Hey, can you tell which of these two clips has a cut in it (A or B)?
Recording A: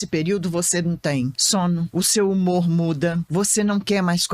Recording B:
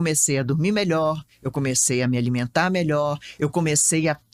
A